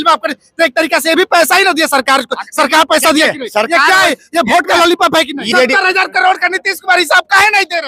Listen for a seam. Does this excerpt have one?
yes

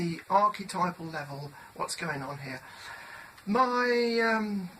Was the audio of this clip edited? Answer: yes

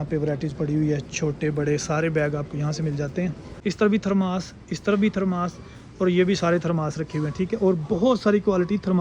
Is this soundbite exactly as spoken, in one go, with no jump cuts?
no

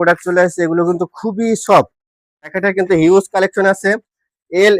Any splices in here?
yes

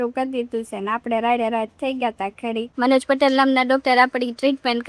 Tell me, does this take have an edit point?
yes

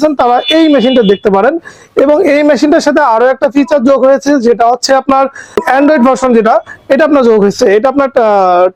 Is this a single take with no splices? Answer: yes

